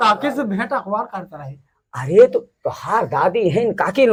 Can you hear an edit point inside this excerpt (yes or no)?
no